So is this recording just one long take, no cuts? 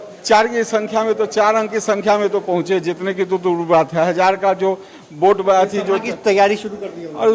yes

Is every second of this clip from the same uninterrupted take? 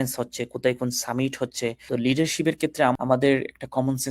no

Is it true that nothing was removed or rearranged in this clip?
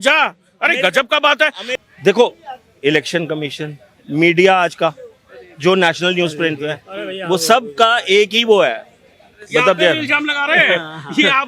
no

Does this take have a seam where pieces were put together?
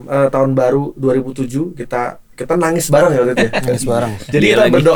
no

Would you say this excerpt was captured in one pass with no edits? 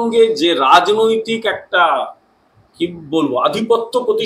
yes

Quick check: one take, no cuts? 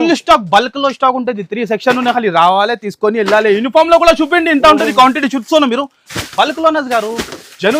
yes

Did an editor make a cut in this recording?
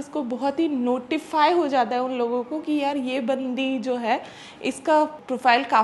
no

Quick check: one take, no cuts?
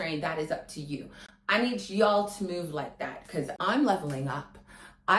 yes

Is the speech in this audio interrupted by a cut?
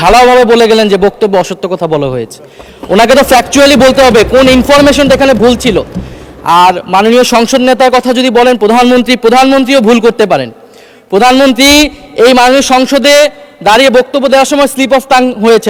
no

